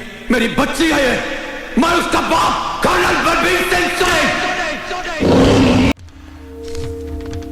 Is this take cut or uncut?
cut